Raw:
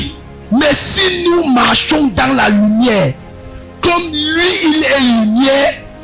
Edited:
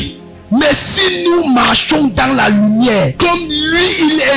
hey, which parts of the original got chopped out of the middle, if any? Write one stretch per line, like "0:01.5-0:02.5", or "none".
0:03.1-0:03.8